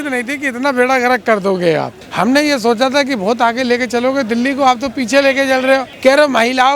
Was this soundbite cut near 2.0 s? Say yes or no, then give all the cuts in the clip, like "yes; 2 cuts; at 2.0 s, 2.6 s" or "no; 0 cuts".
yes; 2 cuts; at 2.0 s, 5.9 s